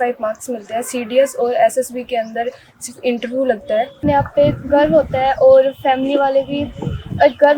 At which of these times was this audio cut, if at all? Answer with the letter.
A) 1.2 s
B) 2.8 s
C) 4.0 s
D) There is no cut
C